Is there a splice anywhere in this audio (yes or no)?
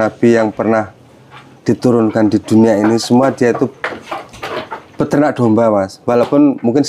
no